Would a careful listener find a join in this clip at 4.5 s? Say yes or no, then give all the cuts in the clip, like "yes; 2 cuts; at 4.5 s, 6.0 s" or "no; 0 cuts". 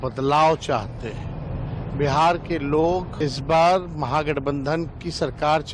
no; 1 cut; at 3.1 s